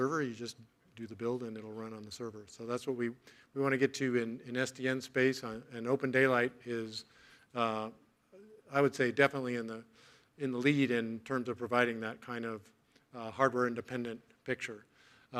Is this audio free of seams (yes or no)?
yes